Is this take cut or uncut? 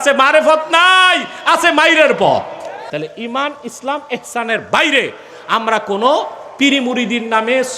cut